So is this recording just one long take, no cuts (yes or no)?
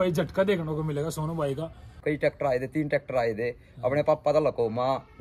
no